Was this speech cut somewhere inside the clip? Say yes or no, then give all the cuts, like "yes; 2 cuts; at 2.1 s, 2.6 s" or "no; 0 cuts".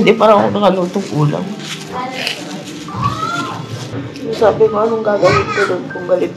yes; 1 cut; at 3.9 s